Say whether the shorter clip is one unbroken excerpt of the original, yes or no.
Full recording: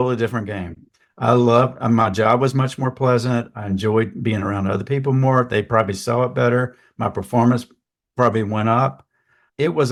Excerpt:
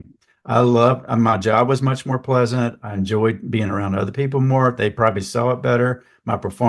yes